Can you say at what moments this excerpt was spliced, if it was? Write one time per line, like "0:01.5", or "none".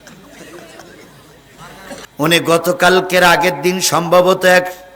0:02.0